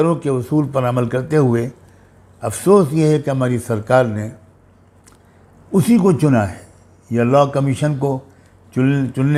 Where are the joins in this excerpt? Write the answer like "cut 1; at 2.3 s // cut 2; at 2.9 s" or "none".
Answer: none